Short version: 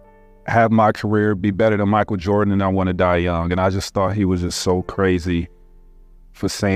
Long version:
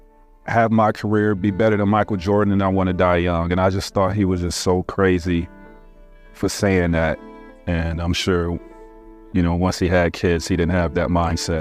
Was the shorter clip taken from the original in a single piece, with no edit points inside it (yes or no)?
yes